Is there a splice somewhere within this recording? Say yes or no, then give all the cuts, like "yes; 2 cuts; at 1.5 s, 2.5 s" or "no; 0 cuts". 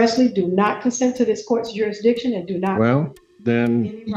no; 0 cuts